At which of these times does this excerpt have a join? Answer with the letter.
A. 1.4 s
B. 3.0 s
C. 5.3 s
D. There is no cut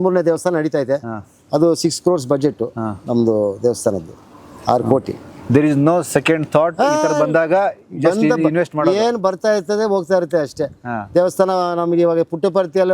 D